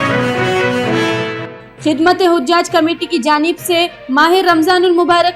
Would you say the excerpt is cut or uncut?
cut